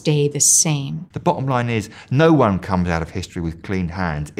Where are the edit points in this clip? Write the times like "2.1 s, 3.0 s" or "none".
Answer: 1.0 s